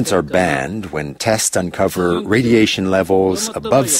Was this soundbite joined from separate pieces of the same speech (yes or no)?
no